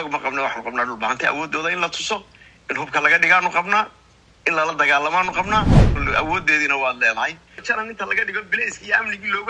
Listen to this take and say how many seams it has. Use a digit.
2